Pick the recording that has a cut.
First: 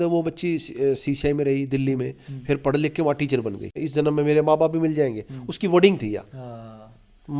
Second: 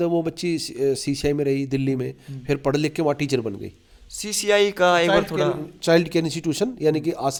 first; 1 cut; at 3.8 s

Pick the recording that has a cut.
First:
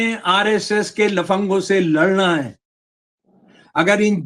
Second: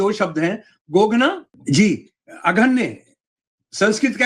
second; 1 cut; at 1.5 s

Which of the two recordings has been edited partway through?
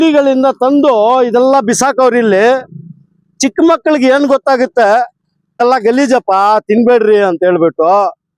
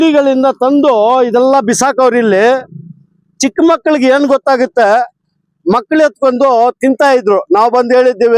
first; 1 cut; at 5.6 s

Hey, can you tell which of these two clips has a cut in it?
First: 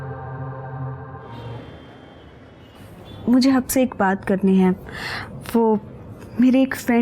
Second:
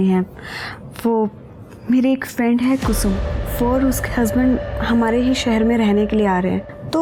first; 1 cut; at 1.4 s

